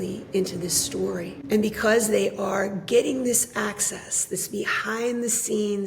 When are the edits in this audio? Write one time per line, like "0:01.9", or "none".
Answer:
0:01.3